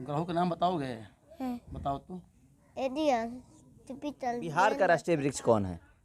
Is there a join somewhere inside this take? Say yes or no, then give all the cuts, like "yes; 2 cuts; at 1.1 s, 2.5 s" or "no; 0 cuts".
yes; 1 cut; at 4.4 s